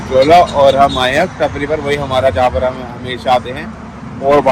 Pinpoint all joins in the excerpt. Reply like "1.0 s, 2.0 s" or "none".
none